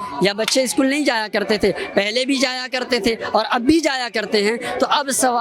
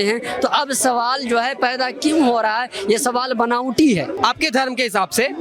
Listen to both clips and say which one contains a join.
second; 1 cut; at 4.1 s

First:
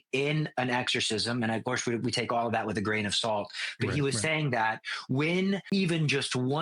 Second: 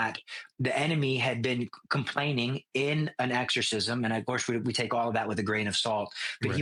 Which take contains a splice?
first; 1 cut; at 5.6 s

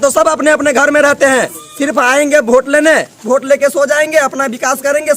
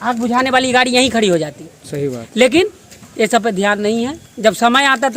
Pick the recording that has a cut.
first; 2 cuts; at 1.6 s, 3.2 s

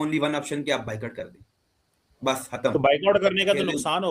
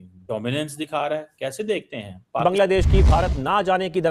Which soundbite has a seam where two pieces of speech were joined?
second; 1 cut; at 2.4 s

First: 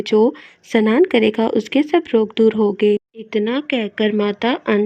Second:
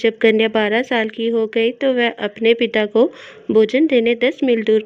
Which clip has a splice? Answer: first; 1 cut; at 3.2 s

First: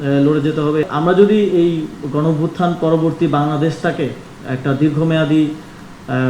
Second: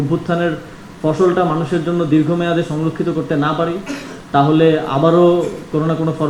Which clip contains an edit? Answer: first; 1 cut; at 0.9 s

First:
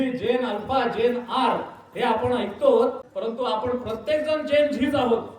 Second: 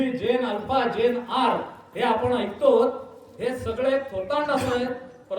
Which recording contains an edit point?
first; 1 cut; at 3.1 s

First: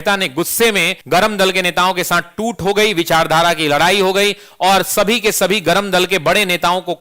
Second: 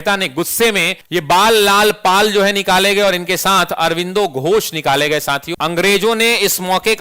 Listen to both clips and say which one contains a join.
second; 2 cuts; at 1.0 s, 5.5 s

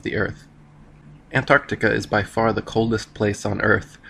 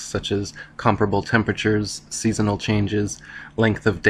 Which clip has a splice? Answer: second; 1 cut; at 2.7 s

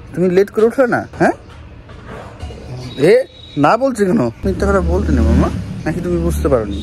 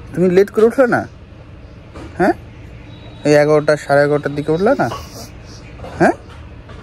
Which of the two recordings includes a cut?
first; 3 cuts; at 1.1 s, 4.4 s, 5.7 s

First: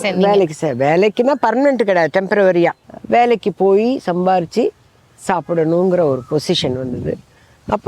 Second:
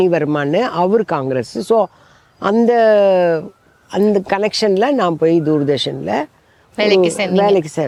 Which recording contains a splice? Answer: first; 1 cut; at 2.9 s

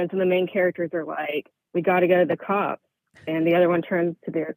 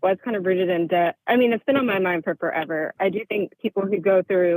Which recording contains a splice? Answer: second; 1 cut; at 3.0 s

